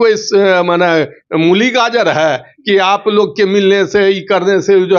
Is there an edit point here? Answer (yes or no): no